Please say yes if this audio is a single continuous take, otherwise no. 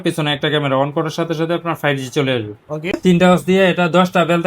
no